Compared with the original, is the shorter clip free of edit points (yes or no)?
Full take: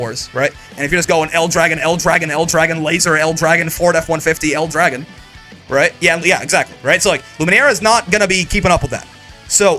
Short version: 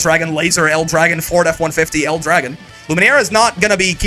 no